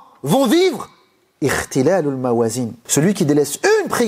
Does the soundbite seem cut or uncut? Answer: cut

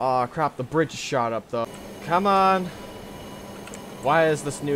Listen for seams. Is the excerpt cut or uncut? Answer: cut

